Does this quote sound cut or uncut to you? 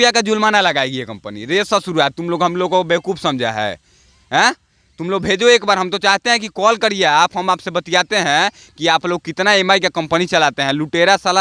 uncut